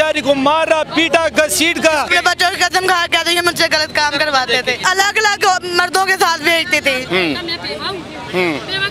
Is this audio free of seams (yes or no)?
no